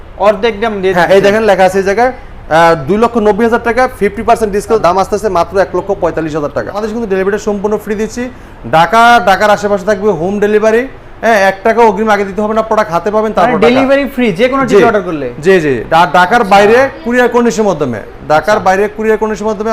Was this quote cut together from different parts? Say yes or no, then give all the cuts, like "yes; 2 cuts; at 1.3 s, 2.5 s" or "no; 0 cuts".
yes; 2 cuts; at 4.8 s, 6.8 s